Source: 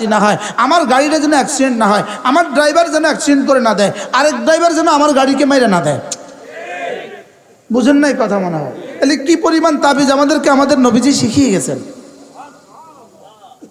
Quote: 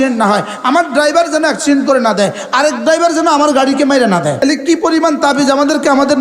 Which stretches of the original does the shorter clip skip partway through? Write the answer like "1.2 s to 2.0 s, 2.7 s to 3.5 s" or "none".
6.0 s to 9.0 s